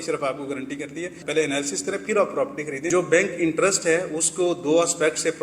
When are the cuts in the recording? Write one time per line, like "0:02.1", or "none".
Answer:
0:01.2
0:02.9